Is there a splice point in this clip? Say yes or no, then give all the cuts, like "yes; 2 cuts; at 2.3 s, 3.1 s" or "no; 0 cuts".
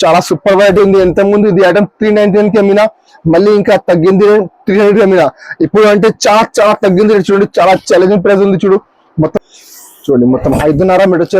yes; 1 cut; at 9.3 s